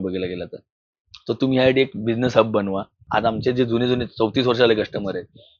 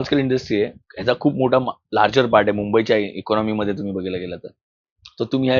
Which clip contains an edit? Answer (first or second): first